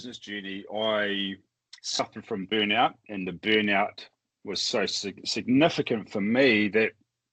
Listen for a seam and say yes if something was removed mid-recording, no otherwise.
no